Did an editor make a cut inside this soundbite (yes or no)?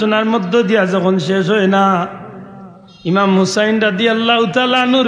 no